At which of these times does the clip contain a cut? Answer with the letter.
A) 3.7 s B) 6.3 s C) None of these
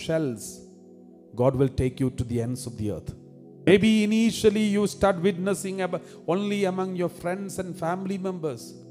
A